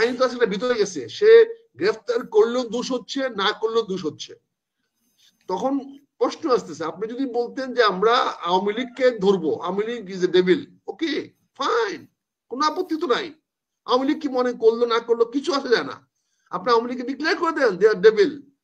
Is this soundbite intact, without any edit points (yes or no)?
yes